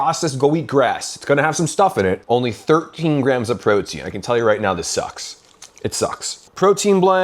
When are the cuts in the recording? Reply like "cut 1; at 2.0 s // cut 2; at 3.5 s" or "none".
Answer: cut 1; at 2.2 s